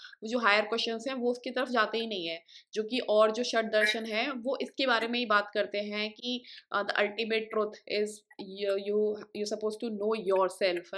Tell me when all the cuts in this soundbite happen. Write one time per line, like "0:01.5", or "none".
none